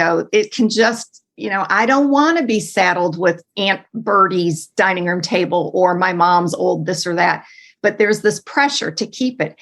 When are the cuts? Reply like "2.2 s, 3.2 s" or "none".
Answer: 3.5 s